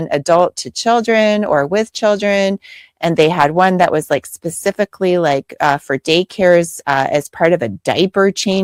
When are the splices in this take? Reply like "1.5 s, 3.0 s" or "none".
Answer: none